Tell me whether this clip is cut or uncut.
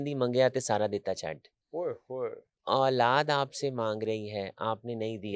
cut